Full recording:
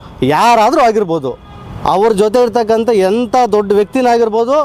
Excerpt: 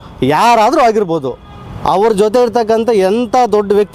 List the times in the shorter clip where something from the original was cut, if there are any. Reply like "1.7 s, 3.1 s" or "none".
none